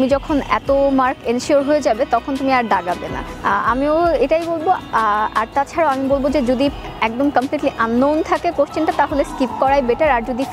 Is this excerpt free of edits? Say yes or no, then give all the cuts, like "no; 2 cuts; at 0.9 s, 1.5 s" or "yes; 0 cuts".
yes; 0 cuts